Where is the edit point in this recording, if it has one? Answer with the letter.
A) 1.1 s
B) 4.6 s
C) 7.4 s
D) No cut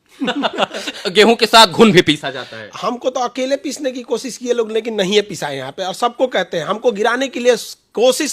A